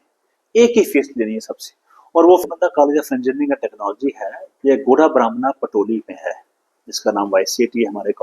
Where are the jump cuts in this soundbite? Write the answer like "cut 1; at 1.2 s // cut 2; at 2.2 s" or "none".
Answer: cut 1; at 2.4 s